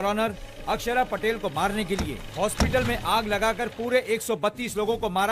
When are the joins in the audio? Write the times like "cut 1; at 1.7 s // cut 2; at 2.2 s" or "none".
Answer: none